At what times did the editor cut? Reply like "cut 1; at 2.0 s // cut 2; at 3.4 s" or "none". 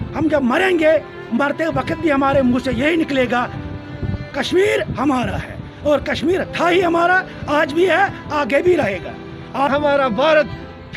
cut 1; at 9.7 s